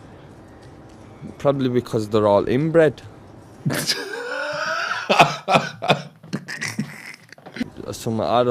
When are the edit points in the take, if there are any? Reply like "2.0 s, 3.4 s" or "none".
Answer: 7.6 s